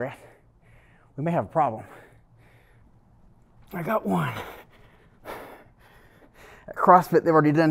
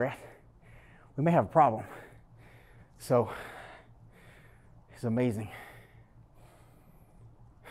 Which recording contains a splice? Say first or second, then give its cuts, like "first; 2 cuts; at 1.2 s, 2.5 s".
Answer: first; 2 cuts; at 2.9 s, 6.3 s